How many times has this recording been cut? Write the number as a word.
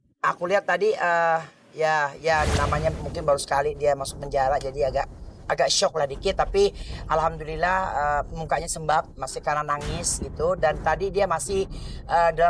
zero